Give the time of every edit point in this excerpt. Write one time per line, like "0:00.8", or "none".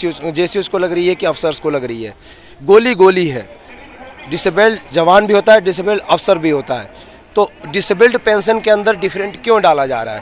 none